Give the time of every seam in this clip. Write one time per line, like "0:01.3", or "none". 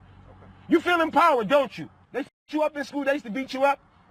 0:02.5